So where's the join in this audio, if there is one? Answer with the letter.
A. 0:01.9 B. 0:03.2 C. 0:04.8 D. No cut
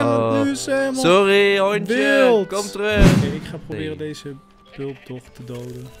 B